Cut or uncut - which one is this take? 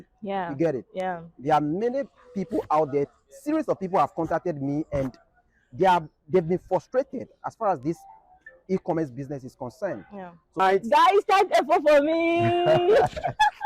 cut